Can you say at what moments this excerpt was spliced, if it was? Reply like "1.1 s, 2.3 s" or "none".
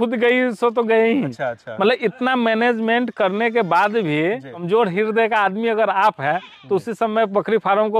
1.4 s, 4.6 s